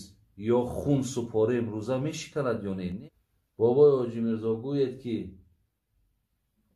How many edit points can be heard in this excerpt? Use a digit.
1